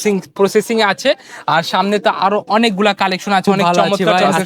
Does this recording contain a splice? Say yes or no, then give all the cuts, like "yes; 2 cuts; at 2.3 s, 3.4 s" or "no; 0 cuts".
no; 0 cuts